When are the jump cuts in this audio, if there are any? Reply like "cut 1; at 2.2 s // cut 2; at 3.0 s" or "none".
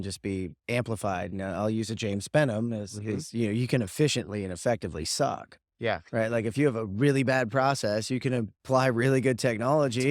none